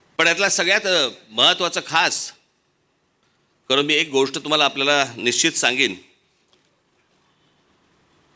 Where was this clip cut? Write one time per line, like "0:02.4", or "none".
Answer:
none